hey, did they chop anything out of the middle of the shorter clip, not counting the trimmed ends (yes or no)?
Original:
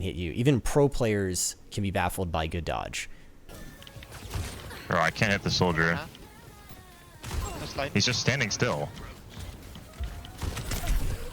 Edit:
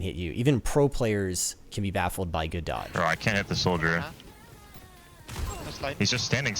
yes